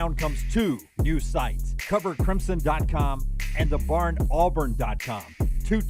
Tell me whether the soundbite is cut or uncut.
uncut